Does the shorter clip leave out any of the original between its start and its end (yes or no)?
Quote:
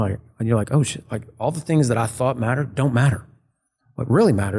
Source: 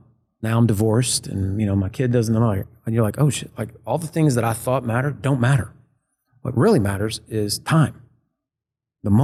no